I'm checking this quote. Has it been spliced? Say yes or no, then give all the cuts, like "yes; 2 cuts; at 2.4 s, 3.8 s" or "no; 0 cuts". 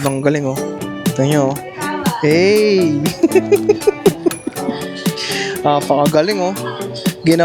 no; 0 cuts